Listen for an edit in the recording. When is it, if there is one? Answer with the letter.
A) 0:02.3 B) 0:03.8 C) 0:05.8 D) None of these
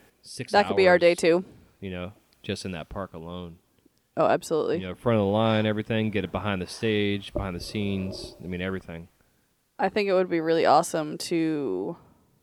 A